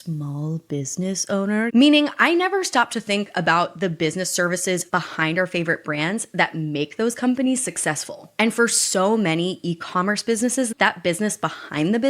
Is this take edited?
yes; 3 cuts; at 1.7 s, 4.8 s, 10.7 s

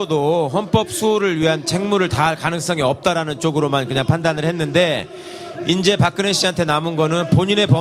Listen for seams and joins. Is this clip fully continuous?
no; 1 cut; at 5.3 s

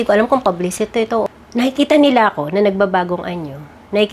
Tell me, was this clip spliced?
yes; 1 cut; at 1.2 s

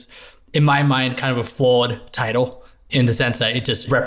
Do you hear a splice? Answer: no; 0 cuts

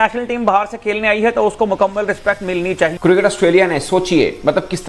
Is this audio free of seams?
no; 1 cut; at 2.9 s

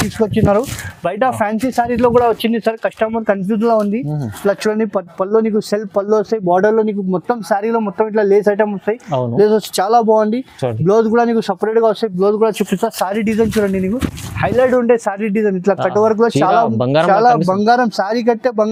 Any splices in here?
no; 0 cuts

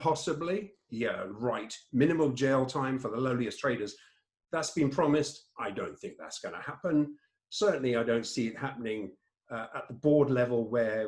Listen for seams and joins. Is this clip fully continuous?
yes; 0 cuts

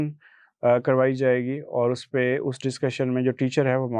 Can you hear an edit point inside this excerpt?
no; 0 cuts

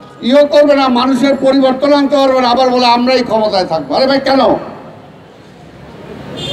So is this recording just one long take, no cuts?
yes; 0 cuts

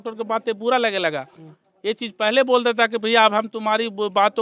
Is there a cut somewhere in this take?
no; 0 cuts

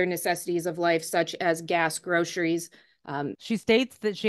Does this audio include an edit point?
yes; 1 cut; at 3.4 s

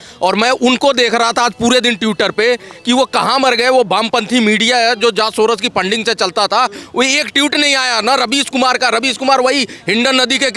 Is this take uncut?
yes; 0 cuts

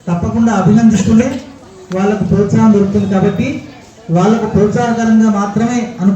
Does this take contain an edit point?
no; 0 cuts

